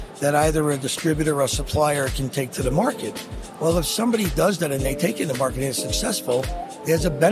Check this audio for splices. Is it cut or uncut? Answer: uncut